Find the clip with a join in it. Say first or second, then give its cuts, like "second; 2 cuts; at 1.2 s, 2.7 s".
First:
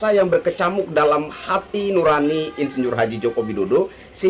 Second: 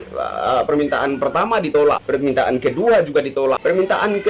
second; 2 cuts; at 1.7 s, 3.3 s